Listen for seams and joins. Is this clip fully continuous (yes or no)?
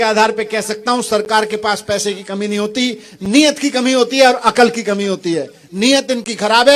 yes